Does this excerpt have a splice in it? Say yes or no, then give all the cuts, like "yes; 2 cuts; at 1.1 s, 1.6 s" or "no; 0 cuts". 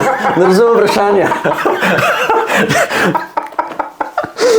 no; 0 cuts